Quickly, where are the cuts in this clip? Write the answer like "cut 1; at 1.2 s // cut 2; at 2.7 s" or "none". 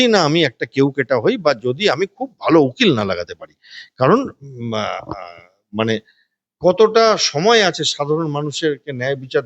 none